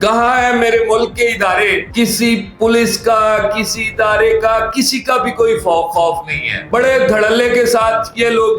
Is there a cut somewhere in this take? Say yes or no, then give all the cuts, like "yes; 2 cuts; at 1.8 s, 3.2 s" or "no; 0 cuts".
yes; 1 cut; at 1.8 s